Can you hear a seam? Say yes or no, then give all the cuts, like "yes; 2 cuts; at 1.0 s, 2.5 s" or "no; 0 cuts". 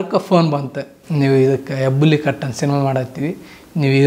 no; 0 cuts